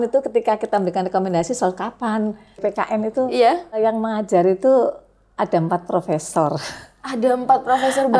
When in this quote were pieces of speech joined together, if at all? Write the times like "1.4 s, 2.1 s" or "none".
2.6 s, 3.8 s